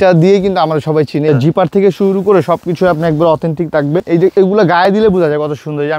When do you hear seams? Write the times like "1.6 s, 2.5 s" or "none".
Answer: 1.3 s, 4.0 s